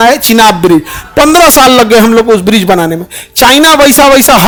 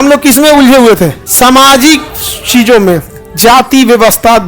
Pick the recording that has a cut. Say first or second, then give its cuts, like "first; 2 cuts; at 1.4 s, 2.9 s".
second; 1 cut; at 1.2 s